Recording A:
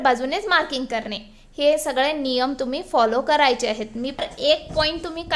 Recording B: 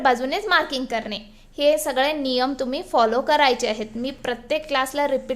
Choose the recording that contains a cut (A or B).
A